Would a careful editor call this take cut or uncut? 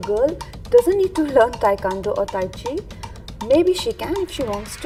uncut